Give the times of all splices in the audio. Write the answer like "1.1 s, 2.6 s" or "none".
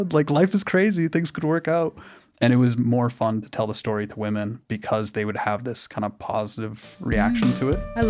none